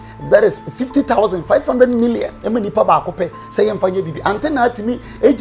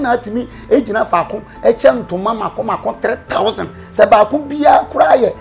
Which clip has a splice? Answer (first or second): first